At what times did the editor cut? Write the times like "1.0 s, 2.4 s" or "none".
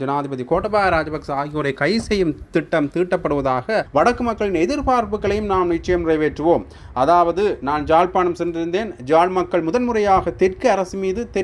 3.9 s